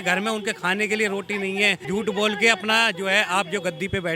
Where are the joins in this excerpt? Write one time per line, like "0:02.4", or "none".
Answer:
0:01.8